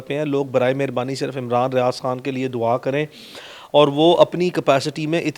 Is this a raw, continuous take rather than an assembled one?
yes; 0 cuts

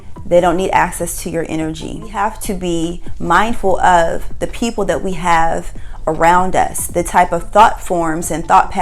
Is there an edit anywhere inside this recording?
yes; 1 cut; at 2.1 s

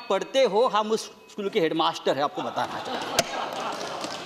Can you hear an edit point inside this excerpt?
no; 0 cuts

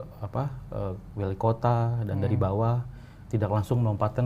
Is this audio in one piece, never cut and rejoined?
yes; 0 cuts

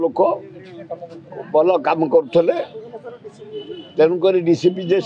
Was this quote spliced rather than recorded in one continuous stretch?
no; 0 cuts

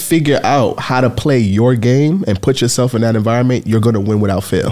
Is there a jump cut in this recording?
no; 0 cuts

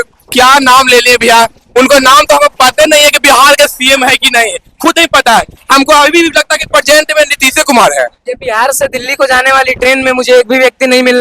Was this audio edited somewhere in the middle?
yes; 1 cut; at 8.2 s

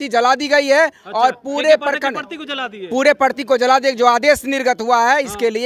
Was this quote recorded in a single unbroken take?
yes; 0 cuts

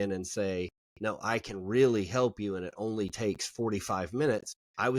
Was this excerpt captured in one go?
yes; 0 cuts

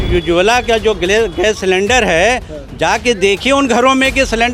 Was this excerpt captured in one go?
yes; 0 cuts

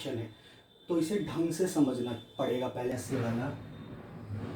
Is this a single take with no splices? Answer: no; 1 cut; at 2.9 s

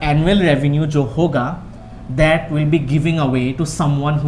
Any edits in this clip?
no; 0 cuts

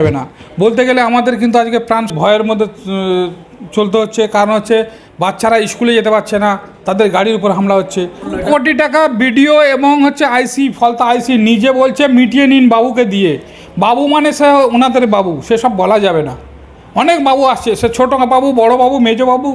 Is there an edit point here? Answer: yes; 2 cuts; at 2.1 s, 8.3 s

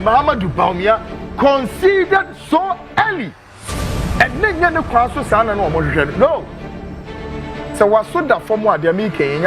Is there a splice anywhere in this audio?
no; 0 cuts

